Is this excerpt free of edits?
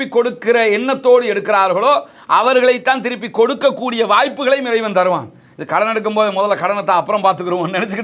yes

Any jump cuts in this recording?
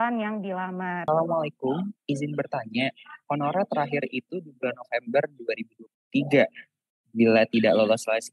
yes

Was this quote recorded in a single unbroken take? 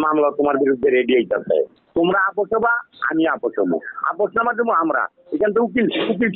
no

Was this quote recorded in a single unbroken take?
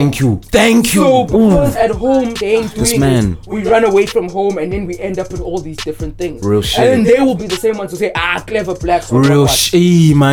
yes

